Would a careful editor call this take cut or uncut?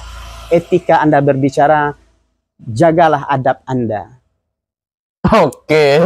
uncut